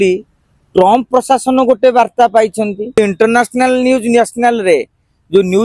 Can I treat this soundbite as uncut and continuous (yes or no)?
no